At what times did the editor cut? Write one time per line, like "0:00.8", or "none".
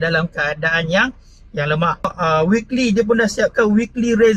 0:02.1